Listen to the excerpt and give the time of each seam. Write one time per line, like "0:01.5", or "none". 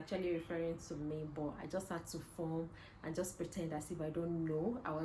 none